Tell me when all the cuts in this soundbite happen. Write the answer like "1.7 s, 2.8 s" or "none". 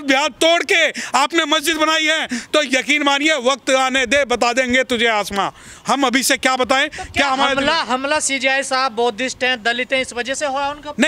none